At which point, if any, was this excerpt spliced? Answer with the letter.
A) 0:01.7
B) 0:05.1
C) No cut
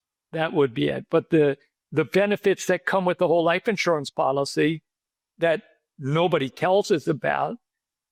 C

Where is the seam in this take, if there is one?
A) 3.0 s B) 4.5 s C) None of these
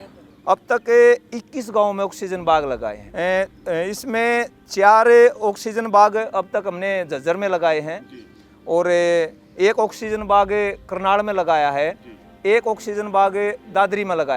A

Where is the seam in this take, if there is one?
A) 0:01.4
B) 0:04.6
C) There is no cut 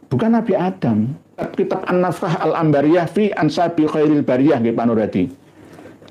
A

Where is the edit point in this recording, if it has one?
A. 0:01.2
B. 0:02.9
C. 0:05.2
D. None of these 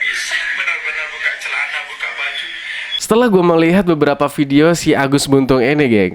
B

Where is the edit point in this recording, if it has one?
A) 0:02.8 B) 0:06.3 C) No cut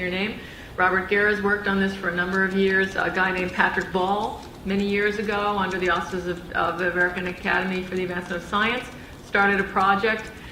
C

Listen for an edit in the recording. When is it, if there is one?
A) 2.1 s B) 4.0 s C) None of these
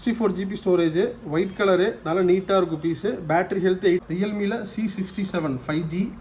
B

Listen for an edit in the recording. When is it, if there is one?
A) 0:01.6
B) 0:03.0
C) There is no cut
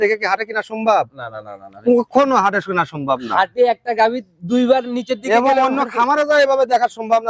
C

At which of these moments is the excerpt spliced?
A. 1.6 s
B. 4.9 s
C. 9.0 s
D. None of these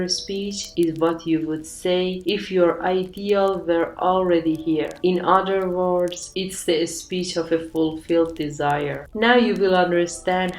C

